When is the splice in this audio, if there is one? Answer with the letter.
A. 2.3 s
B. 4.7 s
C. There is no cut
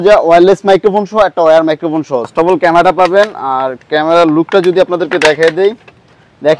A